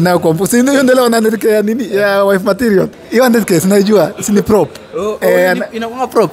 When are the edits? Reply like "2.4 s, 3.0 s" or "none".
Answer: 2.9 s